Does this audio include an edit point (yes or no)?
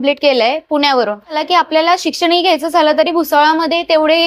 yes